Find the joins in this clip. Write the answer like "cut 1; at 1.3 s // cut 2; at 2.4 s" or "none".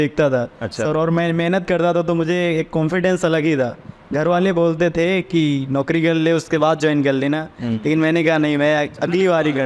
none